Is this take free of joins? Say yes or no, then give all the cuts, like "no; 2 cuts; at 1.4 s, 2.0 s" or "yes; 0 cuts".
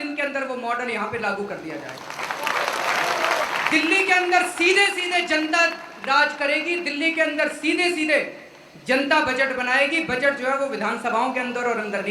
yes; 0 cuts